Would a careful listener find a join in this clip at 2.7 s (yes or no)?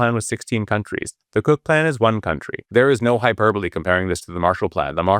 yes